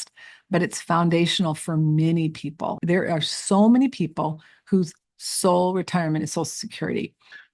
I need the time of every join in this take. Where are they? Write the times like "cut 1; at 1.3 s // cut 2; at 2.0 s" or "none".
cut 1; at 2.8 s